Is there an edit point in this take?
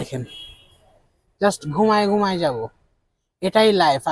no; 0 cuts

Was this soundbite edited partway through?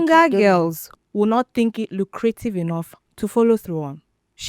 no; 0 cuts

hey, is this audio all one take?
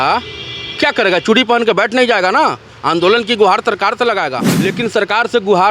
no; 1 cut; at 4.4 s

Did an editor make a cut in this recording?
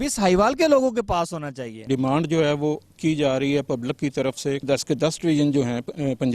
yes; 2 cuts; at 1.9 s, 4.6 s

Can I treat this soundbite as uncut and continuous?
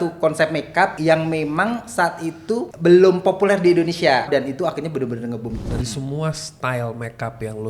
no; 4 cuts; at 1.0 s, 2.7 s, 4.3 s, 5.5 s

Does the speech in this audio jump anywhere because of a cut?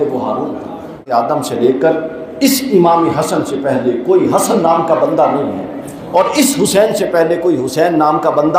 yes; 1 cut; at 1.0 s

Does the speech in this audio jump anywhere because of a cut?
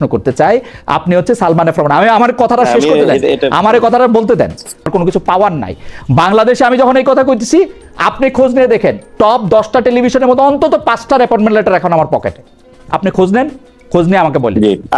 yes; 1 cut; at 4.9 s

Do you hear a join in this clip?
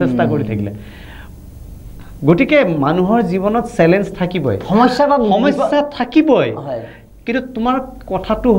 no; 0 cuts

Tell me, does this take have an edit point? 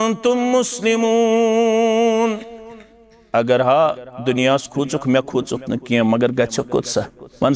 no; 0 cuts

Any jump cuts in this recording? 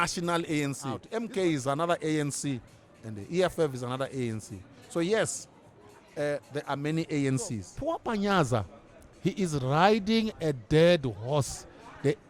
yes; 2 cuts; at 1.1 s, 7.7 s

